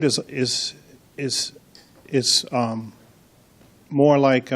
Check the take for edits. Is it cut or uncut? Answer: cut